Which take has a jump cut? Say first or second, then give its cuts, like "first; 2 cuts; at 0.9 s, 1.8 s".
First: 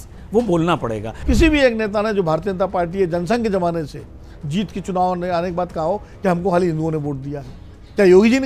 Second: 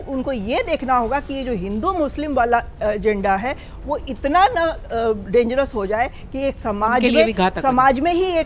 first; 1 cut; at 1.1 s